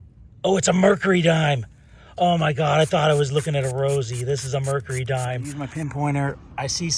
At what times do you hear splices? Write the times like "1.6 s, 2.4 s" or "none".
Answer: 5.5 s